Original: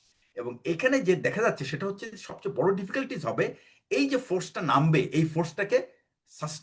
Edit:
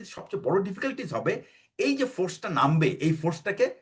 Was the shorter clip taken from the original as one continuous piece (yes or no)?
yes